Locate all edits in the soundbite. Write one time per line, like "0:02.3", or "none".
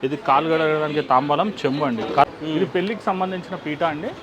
0:02.3